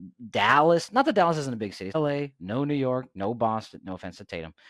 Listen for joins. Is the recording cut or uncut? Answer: cut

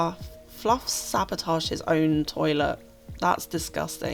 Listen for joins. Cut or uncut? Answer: uncut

